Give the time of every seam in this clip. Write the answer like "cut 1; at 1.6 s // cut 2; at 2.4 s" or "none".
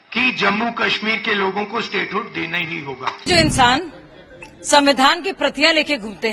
cut 1; at 3.2 s